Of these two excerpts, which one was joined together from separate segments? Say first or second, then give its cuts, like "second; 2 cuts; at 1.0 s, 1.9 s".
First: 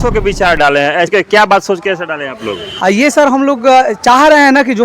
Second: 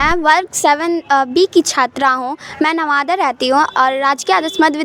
first; 1 cut; at 1.1 s